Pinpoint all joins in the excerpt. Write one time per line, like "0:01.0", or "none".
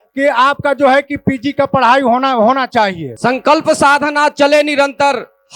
0:03.1

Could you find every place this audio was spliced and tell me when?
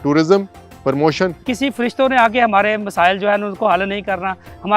0:01.5

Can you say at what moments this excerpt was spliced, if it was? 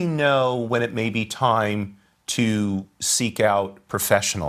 none

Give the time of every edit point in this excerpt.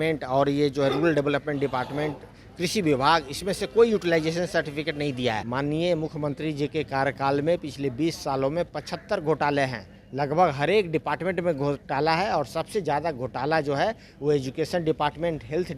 0:05.4

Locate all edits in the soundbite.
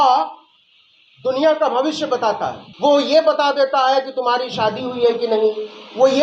0:02.6

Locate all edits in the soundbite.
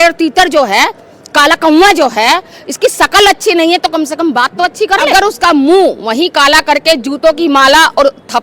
0:05.1

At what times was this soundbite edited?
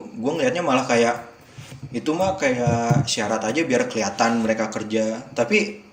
none

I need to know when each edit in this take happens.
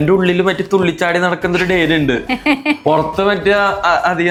none

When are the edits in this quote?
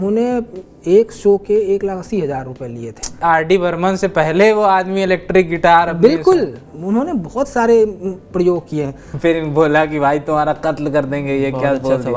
0:03.2
0:09.0

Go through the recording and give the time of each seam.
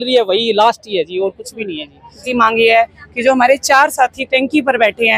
0:02.3

